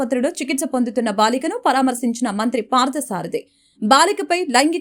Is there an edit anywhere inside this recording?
no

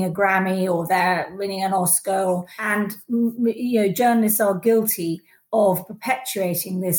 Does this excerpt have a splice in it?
yes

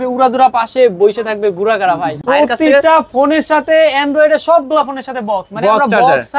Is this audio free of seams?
no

